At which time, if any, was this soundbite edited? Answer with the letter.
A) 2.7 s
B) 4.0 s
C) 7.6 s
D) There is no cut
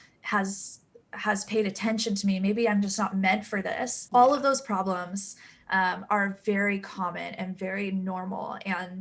B